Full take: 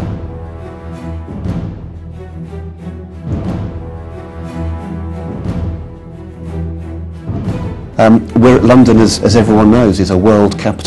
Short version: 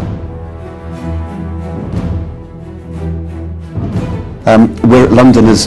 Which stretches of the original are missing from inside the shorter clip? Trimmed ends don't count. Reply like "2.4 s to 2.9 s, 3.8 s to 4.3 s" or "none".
0.9 s to 4.4 s